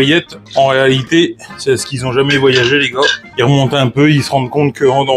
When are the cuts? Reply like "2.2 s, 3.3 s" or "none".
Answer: 3.2 s

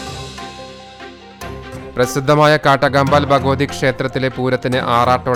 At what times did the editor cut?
none

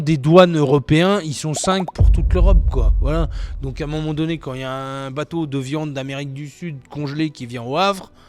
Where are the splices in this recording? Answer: none

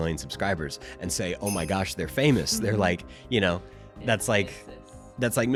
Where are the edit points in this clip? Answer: none

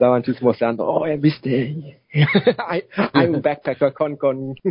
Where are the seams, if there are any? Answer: none

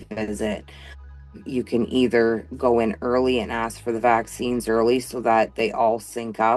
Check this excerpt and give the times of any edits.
4.6 s

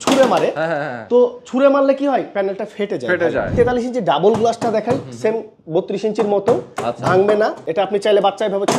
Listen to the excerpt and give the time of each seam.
3.5 s, 7.6 s

